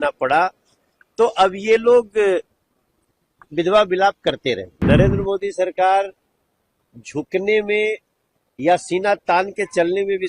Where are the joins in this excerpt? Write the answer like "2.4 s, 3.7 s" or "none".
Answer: 4.7 s